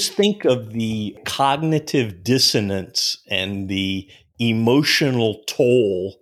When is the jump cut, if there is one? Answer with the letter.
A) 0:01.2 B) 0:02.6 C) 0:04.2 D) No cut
A